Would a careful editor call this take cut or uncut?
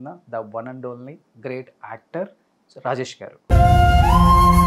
uncut